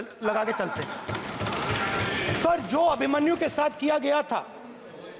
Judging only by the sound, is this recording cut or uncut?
uncut